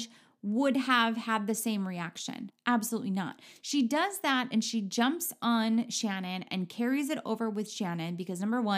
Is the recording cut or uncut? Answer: cut